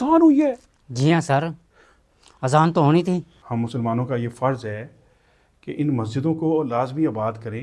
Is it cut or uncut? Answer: cut